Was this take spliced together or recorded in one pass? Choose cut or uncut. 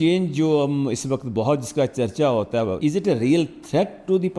cut